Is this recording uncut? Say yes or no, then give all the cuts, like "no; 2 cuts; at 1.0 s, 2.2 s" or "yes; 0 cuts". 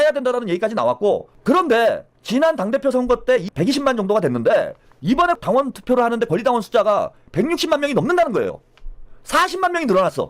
no; 4 cuts; at 1.3 s, 2.1 s, 3.5 s, 5.2 s